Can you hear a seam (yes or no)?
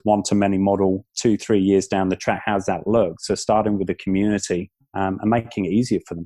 yes